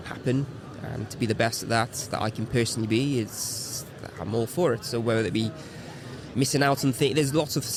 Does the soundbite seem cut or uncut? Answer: uncut